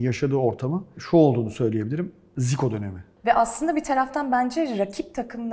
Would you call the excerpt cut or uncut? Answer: cut